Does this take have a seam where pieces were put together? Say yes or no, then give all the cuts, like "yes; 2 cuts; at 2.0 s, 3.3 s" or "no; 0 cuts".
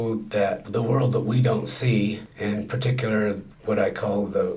no; 0 cuts